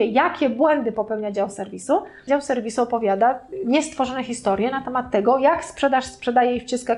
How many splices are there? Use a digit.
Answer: 2